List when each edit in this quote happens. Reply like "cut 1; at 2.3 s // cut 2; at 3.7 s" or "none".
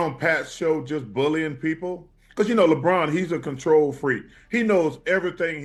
none